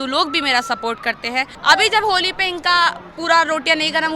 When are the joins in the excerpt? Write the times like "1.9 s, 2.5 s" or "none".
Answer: 1.5 s